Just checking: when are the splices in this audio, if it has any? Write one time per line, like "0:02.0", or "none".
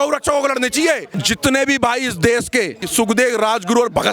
0:01.1
0:02.8